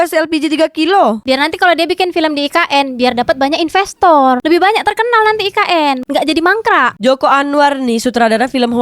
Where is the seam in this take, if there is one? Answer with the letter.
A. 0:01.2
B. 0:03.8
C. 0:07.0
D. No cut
A